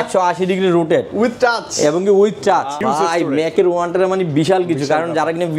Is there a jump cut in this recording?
yes; 1 cut; at 2.8 s

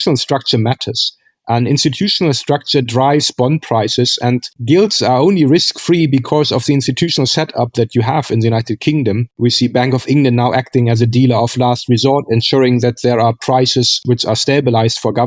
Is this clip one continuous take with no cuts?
yes; 0 cuts

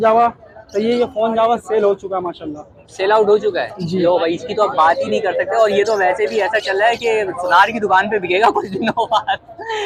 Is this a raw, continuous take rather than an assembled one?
yes; 0 cuts

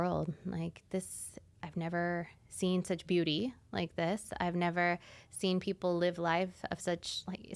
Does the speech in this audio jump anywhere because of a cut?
no; 0 cuts

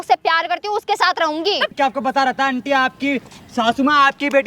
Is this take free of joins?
no; 1 cut; at 1.7 s

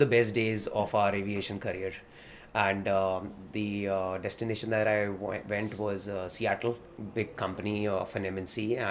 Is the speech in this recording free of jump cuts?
no; 1 cut; at 6.9 s

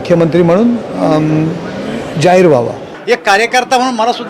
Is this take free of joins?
no; 1 cut; at 2.8 s

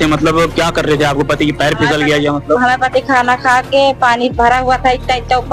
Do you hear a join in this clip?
no; 0 cuts

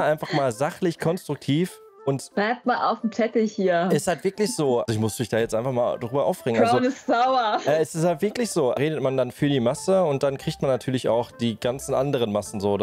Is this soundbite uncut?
no; 2 cuts; at 4.9 s, 8.8 s

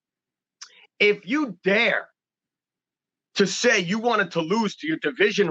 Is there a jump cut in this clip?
no; 0 cuts

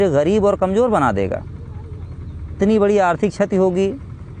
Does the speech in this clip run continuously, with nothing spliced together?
no; 1 cut; at 2.6 s

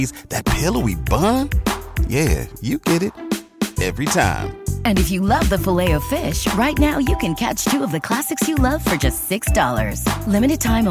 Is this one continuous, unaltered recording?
yes; 0 cuts

